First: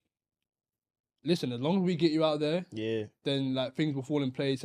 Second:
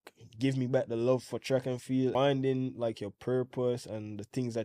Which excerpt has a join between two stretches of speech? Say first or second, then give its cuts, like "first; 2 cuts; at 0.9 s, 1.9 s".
second; 1 cut; at 2.1 s